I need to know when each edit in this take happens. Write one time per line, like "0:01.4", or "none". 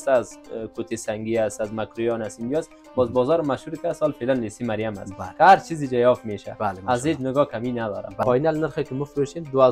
0:08.2

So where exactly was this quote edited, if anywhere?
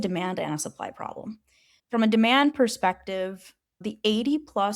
0:01.8

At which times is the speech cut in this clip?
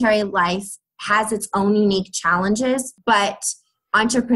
0:02.9

